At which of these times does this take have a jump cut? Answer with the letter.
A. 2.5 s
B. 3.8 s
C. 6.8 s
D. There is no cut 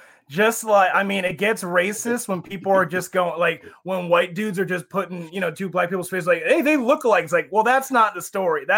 D